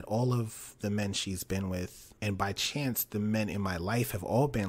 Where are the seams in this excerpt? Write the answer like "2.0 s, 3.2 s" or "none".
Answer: 2.0 s